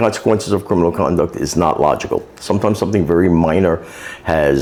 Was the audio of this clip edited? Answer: no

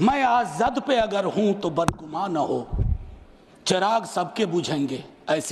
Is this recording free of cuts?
yes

